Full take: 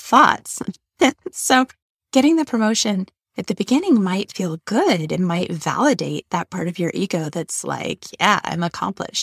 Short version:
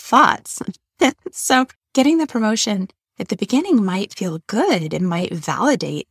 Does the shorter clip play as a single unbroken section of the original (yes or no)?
no